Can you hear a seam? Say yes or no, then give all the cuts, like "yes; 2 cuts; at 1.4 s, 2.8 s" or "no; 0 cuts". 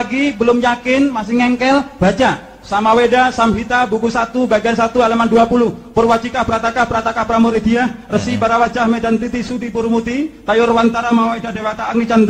no; 0 cuts